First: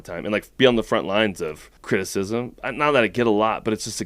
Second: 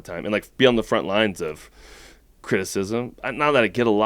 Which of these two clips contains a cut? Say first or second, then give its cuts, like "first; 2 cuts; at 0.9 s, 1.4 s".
first; 1 cut; at 1.7 s